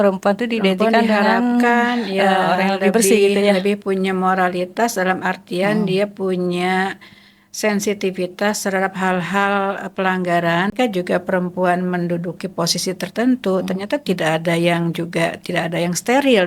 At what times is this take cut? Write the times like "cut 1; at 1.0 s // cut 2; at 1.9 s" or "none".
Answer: cut 1; at 10.7 s